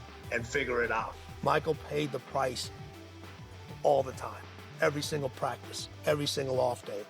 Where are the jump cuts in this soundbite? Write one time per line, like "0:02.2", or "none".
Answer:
0:01.0